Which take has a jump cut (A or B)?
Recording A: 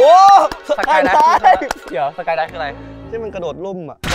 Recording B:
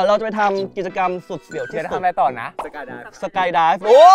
A